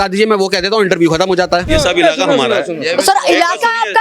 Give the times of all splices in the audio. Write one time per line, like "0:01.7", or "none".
0:01.7